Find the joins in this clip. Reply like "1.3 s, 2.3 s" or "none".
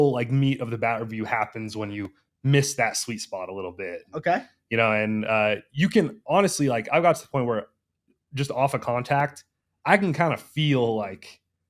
none

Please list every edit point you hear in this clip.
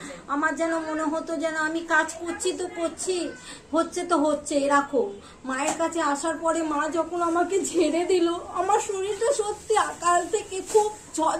none

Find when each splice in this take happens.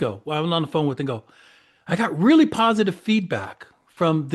none

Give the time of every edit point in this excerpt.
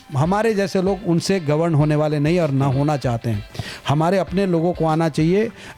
none

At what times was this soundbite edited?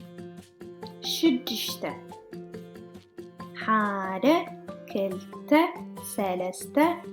1.2 s

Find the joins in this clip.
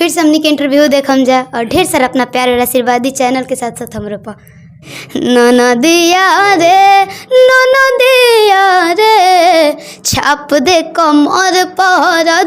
none

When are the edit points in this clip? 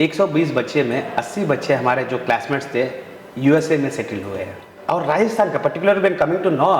4.7 s

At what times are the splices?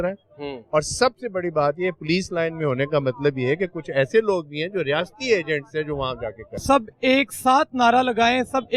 6.6 s

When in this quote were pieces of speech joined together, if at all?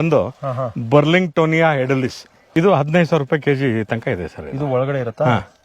2.3 s

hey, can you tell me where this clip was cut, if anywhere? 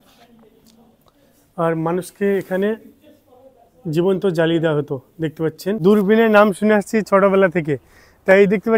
5.8 s

